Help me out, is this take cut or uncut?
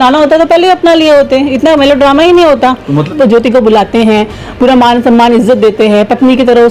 cut